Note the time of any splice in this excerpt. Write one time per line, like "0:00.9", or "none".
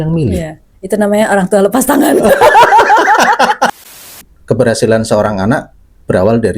0:04.1